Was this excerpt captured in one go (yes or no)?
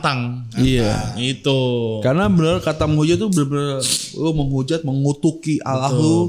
yes